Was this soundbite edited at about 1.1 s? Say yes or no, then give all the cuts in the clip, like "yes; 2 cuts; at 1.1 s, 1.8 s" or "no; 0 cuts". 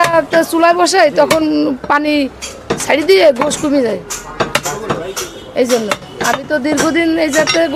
no; 0 cuts